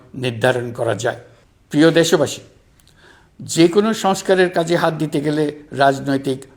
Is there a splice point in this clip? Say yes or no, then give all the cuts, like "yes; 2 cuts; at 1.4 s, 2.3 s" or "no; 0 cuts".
no; 0 cuts